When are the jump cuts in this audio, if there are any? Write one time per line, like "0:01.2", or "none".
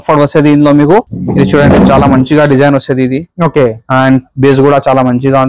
0:01.2